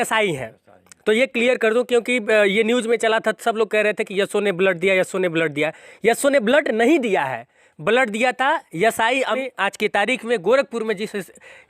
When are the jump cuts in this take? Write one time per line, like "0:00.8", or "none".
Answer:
0:09.4